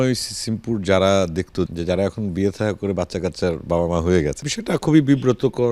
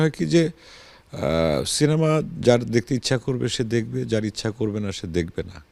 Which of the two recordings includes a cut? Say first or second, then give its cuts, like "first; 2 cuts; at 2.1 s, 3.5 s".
first; 2 cuts; at 1.7 s, 4.4 s